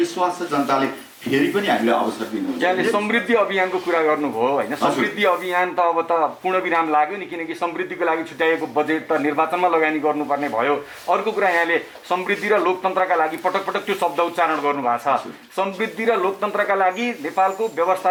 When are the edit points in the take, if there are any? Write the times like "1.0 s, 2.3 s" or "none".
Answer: none